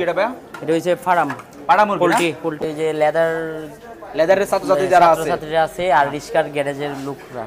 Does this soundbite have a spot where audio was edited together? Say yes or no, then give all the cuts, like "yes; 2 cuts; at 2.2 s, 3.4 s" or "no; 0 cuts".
yes; 1 cut; at 2.6 s